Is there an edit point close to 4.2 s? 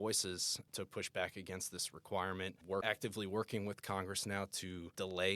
no; 1 cut; at 2.7 s

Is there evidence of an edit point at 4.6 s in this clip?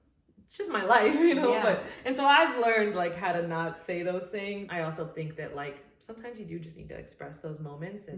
yes; 1 cut; at 4.6 s

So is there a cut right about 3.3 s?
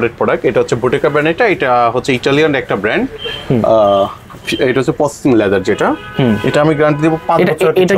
no; 0 cuts

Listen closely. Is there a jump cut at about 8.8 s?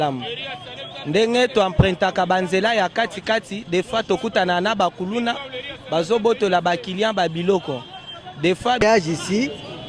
yes; 1 cut; at 8.8 s

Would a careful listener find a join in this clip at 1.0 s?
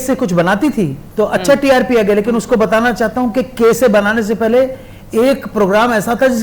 yes; 1 cut; at 1.0 s

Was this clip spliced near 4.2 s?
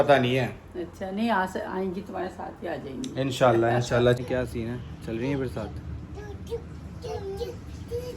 yes; 1 cut; at 4.2 s

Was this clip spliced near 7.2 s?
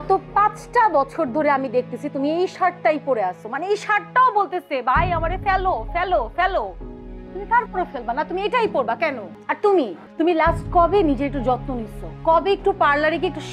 no; 2 cuts; at 9.3 s, 10.0 s

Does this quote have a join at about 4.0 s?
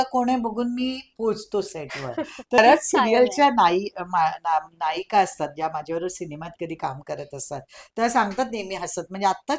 no; 1 cut; at 2.6 s

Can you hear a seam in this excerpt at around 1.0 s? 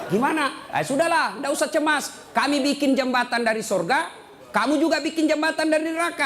no; 0 cuts

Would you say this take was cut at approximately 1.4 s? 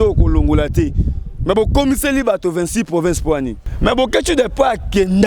no; 1 cut; at 3.6 s

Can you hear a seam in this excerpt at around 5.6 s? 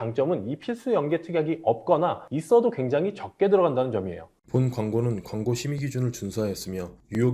no; 1 cut; at 4.3 s

